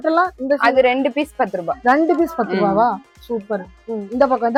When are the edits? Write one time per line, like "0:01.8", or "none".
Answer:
none